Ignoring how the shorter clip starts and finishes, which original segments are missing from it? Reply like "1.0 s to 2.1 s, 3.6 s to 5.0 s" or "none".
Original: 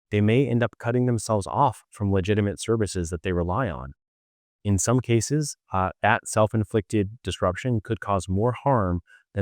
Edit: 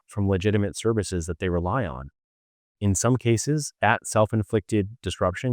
5.6 s to 5.9 s